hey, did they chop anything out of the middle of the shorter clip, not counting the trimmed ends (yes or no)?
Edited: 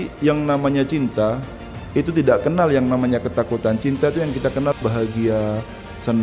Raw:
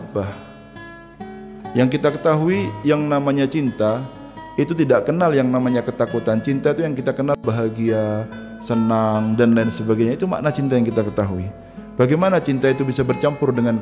no